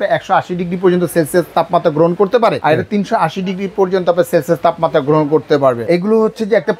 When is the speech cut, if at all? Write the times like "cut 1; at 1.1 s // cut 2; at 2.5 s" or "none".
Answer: cut 1; at 2.6 s // cut 2; at 5.8 s